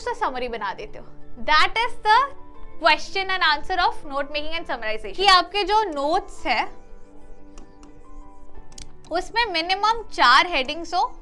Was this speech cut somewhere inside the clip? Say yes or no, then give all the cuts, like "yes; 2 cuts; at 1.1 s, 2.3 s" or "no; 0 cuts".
yes; 1 cut; at 5.1 s